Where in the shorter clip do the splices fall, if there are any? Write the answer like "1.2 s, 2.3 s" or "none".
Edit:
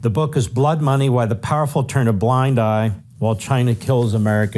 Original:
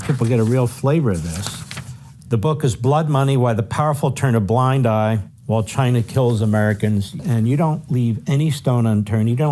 none